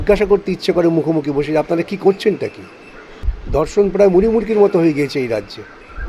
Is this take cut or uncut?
cut